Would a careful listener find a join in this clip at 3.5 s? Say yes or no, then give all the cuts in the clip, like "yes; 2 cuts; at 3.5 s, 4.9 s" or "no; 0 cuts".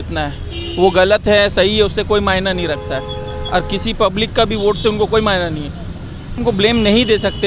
no; 1 cut; at 6.4 s